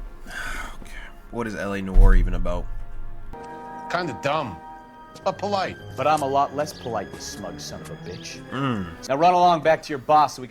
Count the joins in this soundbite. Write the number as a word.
two